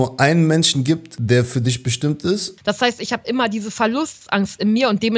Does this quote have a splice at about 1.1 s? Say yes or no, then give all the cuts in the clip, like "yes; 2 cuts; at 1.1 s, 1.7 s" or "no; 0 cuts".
yes; 2 cuts; at 1.1 s, 2.5 s